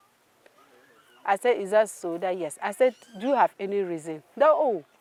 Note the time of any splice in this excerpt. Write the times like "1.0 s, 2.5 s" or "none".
none